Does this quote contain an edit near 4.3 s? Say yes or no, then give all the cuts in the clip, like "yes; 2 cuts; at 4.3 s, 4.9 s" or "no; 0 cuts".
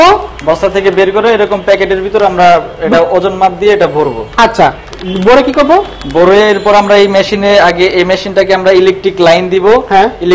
no; 0 cuts